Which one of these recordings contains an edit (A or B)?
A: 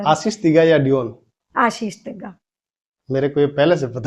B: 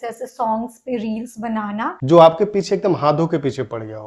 B